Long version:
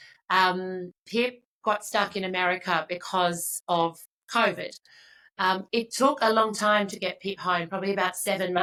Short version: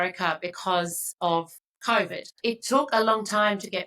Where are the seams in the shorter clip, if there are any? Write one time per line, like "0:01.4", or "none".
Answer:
0:02.4